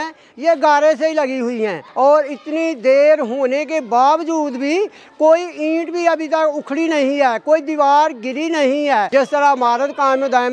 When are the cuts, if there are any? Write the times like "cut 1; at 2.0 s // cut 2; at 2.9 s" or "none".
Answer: cut 1; at 1.8 s // cut 2; at 9.1 s